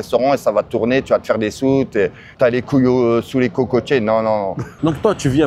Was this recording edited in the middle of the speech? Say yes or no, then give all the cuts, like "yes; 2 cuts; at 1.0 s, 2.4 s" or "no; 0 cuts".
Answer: no; 0 cuts